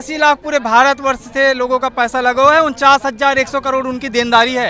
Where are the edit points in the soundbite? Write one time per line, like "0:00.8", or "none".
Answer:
none